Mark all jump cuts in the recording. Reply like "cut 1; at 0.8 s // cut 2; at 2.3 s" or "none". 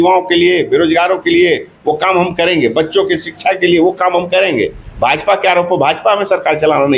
none